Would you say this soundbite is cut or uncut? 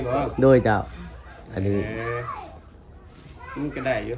uncut